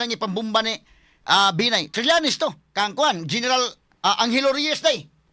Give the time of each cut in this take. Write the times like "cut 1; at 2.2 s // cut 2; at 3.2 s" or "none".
cut 1; at 2.6 s // cut 2; at 3.8 s